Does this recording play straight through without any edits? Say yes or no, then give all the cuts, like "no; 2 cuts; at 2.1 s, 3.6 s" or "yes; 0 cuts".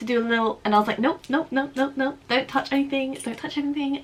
yes; 0 cuts